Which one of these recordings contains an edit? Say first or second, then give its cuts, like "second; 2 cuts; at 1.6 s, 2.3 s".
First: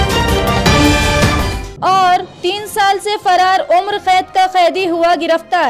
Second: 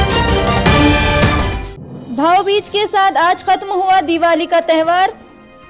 second; 1 cut; at 1.4 s